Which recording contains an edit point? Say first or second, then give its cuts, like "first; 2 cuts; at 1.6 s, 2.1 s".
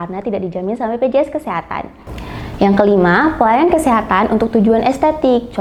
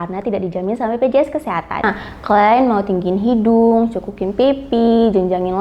second; 1 cut; at 1.9 s